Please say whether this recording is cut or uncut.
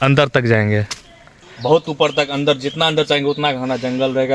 cut